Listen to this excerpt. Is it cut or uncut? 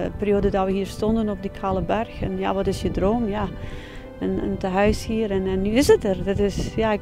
uncut